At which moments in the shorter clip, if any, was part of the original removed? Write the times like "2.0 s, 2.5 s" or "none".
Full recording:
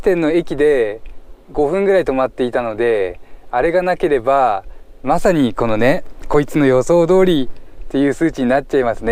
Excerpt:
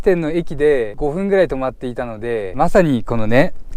0.9 s, 2.5 s

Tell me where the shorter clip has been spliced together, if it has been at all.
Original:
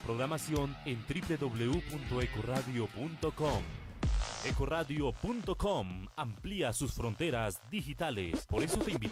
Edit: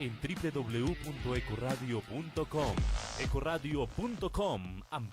2.9 s

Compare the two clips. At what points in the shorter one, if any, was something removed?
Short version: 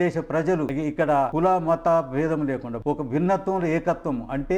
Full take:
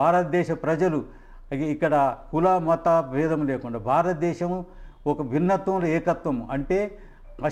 1.2 s, 2.7 s

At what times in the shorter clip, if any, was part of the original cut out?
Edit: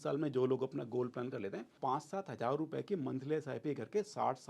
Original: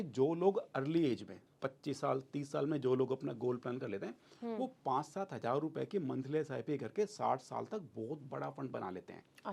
1.7 s

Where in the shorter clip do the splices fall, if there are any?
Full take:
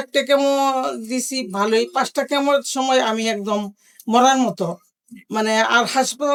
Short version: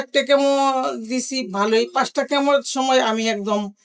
none

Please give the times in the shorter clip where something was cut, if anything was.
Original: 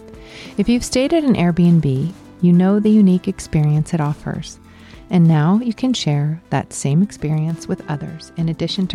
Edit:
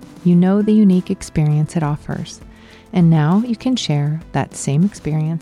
none

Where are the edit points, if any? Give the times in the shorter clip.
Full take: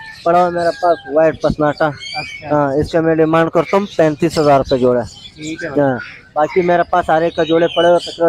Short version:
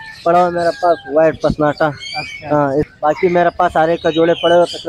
2.9 s

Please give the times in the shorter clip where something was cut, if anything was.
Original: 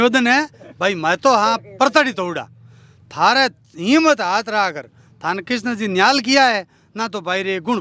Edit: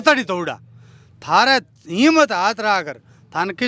none

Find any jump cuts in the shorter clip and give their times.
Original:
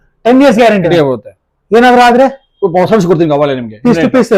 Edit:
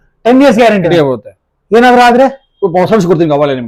none

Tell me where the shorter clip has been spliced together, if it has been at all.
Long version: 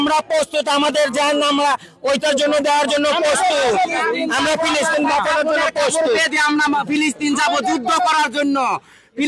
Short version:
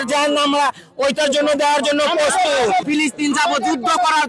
2.8 s

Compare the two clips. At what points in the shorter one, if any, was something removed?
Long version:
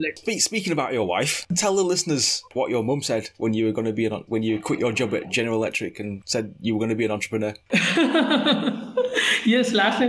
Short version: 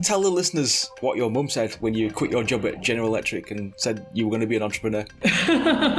1.8 s

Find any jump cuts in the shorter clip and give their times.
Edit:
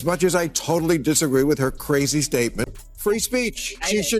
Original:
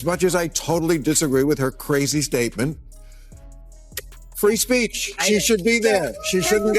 2.6 s

